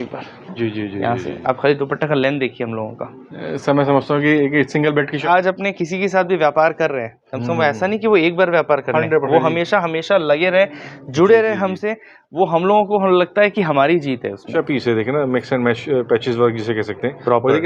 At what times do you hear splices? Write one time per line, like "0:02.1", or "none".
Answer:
0:05.2
0:14.5